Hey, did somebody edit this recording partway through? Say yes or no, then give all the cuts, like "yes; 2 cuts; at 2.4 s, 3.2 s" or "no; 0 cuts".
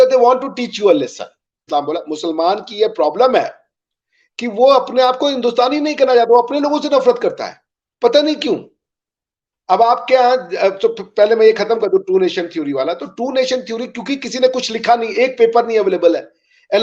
yes; 1 cut; at 1.6 s